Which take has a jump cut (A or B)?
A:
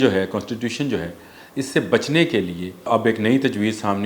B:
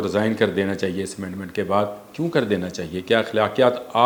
A